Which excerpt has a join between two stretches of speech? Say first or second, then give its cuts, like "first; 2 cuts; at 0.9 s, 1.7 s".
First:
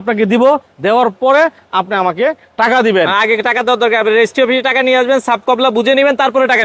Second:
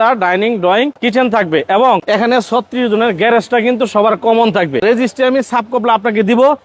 second; 3 cuts; at 1.0 s, 2.0 s, 4.8 s